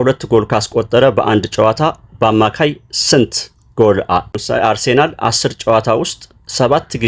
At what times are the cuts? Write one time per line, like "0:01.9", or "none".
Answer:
0:04.4

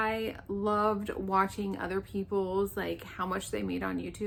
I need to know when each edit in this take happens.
none

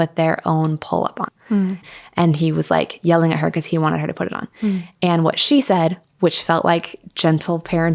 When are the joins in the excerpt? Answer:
0:01.8

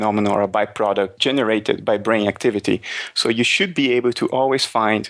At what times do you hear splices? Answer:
0:01.2

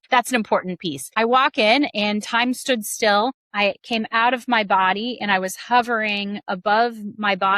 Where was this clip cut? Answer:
0:01.2

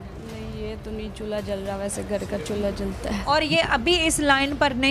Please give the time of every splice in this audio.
0:03.2

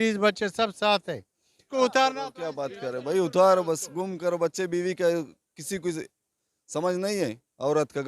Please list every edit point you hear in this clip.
0:01.7

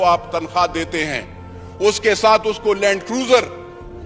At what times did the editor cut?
none

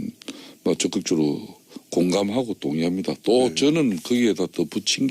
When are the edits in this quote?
0:02.7

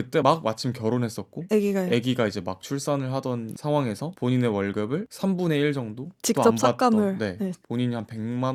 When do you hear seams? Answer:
none

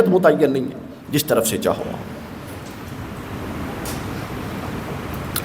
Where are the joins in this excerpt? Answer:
none

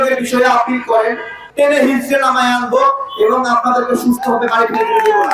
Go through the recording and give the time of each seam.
0:01.4

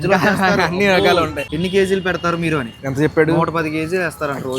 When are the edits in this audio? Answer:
0:01.4

